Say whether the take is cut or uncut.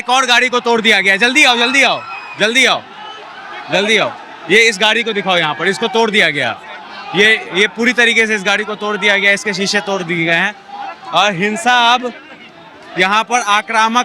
uncut